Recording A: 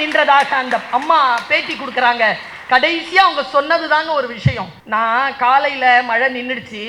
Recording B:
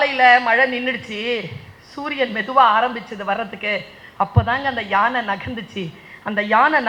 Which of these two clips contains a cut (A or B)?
A